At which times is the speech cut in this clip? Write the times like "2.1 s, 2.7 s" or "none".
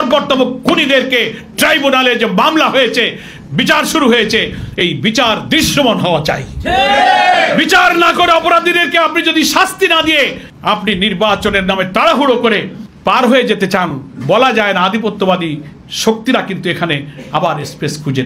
none

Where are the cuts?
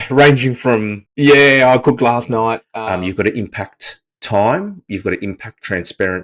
1.0 s, 2.7 s

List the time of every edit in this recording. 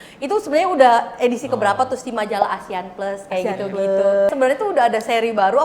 4.3 s

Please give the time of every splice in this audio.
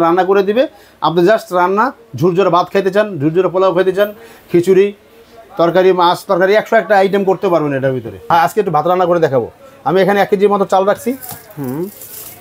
8.3 s

